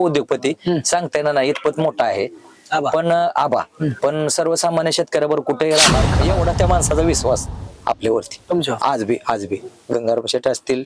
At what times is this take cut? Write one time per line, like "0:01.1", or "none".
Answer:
0:06.1